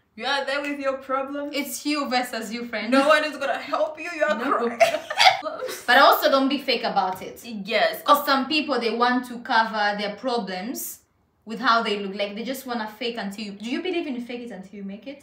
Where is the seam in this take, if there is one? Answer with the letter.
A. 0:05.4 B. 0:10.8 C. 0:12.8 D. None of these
A